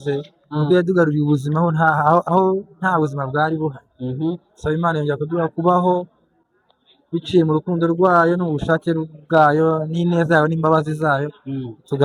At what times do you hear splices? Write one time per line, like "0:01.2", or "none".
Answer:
none